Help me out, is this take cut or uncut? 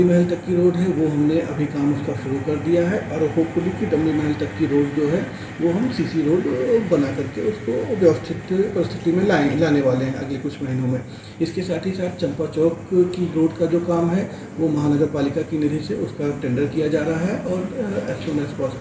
uncut